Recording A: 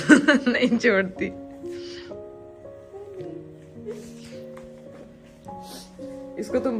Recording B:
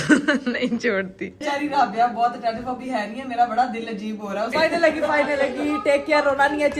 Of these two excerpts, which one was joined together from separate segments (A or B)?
B